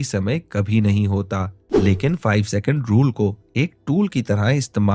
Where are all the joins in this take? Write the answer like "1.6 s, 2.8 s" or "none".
1.6 s